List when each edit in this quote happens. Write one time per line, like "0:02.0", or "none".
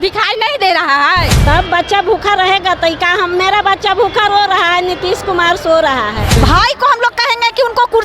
0:01.3
0:06.4